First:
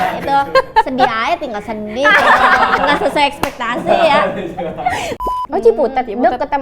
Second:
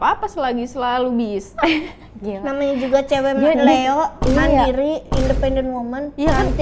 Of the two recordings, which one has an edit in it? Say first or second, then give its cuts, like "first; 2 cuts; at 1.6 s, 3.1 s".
first; 1 cut; at 5.1 s